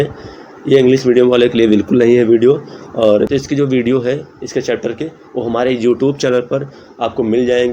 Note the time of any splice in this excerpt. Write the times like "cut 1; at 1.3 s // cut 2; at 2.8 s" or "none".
cut 1; at 3.3 s